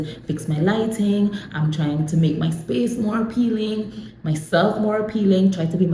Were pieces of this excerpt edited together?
no; 0 cuts

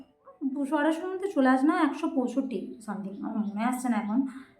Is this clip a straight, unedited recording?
yes; 0 cuts

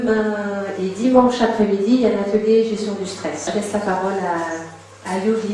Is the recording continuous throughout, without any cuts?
no; 1 cut; at 3.8 s

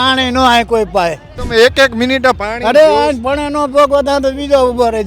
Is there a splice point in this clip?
yes; 1 cut; at 1.3 s

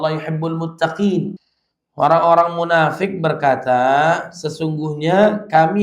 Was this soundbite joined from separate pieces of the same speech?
yes; 1 cut; at 1.4 s

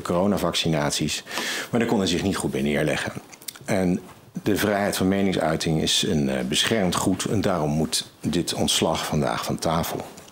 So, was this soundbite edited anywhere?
no; 0 cuts

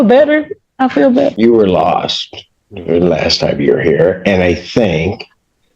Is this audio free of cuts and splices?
no; 1 cut; at 1.3 s

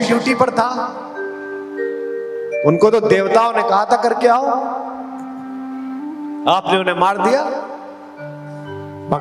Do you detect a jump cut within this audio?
no; 0 cuts

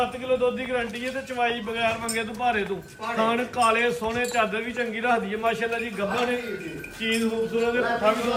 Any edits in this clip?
no; 0 cuts

